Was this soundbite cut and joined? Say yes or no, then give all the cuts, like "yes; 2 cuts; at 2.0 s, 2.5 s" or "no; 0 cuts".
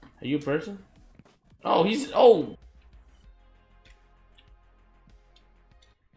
yes; 1 cut; at 2.6 s